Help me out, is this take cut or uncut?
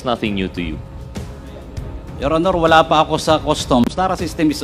cut